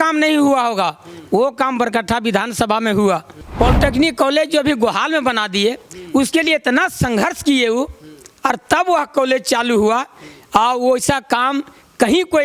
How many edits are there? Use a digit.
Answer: 1